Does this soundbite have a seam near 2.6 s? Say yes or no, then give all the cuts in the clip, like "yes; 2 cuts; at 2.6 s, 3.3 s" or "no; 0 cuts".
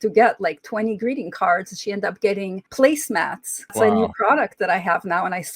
yes; 2 cuts; at 2.6 s, 3.7 s